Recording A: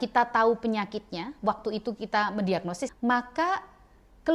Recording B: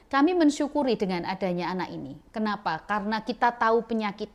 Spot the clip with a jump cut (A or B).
A